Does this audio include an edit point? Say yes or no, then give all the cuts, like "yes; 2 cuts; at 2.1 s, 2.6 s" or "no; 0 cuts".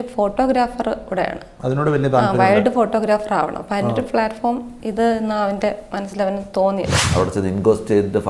yes; 1 cut; at 7.0 s